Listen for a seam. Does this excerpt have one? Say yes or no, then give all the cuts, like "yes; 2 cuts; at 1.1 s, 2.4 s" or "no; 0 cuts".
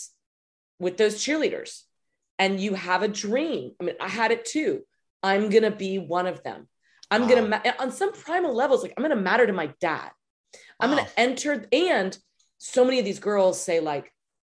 no; 0 cuts